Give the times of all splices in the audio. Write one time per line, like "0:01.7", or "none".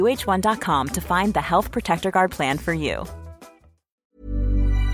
0:04.0